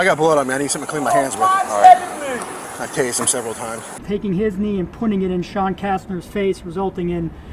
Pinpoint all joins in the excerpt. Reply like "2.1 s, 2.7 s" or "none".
2.7 s, 4.0 s